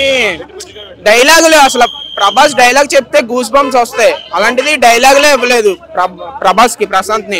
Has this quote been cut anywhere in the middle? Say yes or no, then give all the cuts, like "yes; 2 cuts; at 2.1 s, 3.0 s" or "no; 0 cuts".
no; 0 cuts